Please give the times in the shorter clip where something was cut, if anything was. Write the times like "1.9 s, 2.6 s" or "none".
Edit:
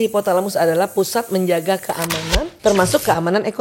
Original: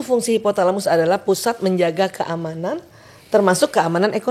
2.5 s